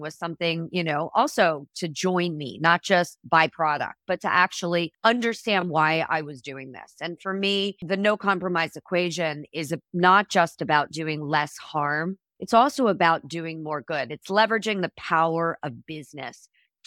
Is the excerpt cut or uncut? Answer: cut